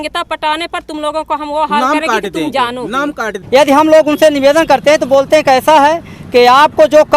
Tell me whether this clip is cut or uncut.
cut